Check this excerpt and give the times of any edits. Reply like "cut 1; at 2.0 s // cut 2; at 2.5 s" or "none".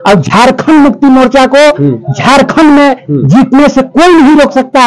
none